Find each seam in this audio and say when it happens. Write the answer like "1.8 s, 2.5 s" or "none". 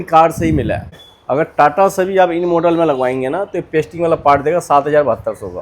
1.0 s